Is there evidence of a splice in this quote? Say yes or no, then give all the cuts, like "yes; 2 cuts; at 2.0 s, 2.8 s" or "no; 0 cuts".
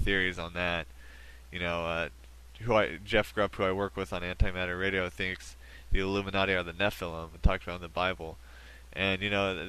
no; 0 cuts